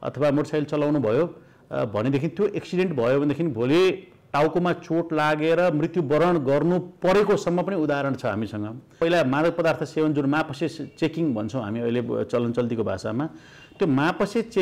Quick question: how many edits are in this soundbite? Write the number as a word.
one